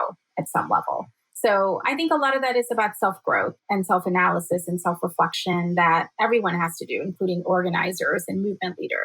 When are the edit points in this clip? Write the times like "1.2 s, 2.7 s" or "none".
1.8 s, 3.6 s